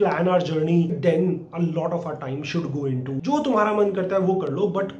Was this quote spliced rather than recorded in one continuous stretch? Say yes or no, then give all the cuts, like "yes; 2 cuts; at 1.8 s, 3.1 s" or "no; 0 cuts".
yes; 2 cuts; at 1.0 s, 3.1 s